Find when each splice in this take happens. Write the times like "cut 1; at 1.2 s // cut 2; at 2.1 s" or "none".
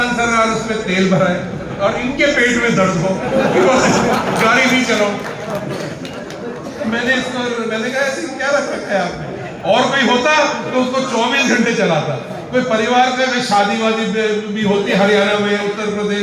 none